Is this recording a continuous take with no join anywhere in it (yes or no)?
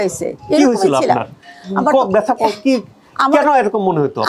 yes